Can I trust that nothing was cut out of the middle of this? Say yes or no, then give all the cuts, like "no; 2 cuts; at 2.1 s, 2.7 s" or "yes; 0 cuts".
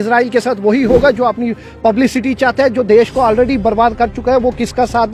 yes; 0 cuts